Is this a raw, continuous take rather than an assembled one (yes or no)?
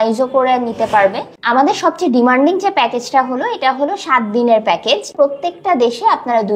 no